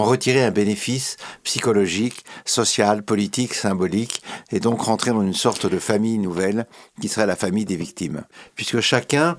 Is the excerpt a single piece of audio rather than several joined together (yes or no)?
no